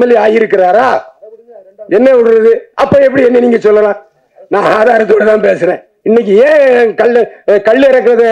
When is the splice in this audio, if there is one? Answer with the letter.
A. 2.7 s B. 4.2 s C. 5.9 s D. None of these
C